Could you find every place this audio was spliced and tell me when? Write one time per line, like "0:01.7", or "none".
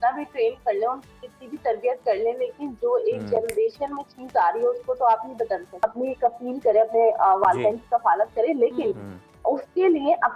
0:05.8